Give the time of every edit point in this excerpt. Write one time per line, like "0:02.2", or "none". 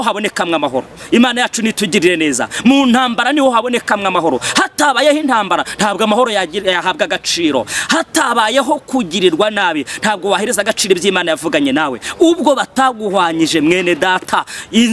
none